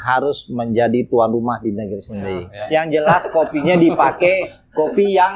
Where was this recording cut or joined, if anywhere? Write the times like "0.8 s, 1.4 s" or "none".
2.5 s